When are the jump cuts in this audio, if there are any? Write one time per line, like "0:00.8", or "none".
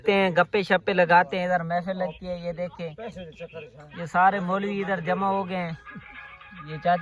none

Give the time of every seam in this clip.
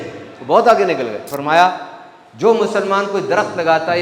0:01.3

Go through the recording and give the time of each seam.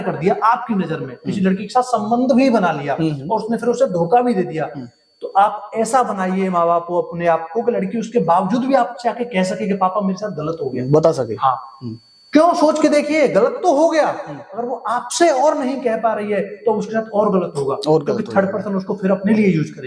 none

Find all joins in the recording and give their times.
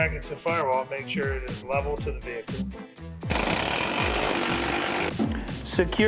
0:03.3
0:05.1

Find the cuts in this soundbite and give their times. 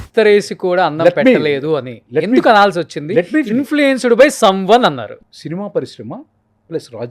0:05.2

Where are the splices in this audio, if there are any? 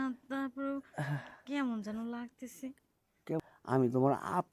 0:03.4

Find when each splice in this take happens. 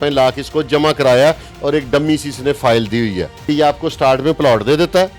0:03.3

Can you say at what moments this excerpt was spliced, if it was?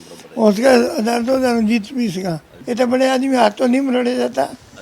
0:02.5

